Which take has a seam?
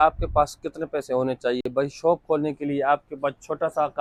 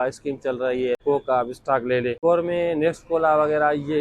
second; 2 cuts; at 1.0 s, 2.2 s

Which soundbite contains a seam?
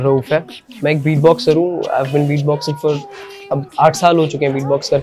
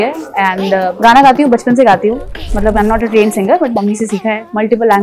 second; 2 cuts; at 0.9 s, 2.5 s

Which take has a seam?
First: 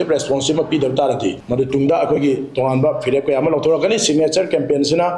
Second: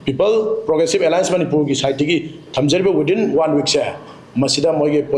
first; 1 cut; at 1.4 s

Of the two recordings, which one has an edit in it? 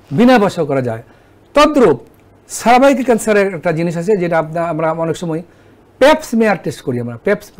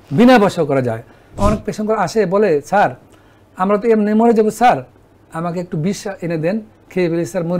second; 1 cut; at 1.4 s

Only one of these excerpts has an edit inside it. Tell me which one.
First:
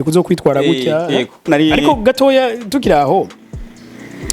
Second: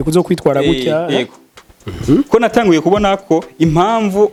first; 1 cut; at 1.5 s

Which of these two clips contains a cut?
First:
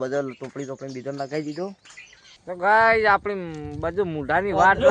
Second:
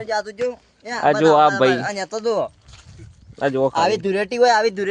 first; 1 cut; at 2.4 s

